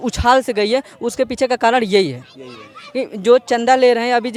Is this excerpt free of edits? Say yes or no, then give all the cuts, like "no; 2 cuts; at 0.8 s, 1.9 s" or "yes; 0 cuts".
yes; 0 cuts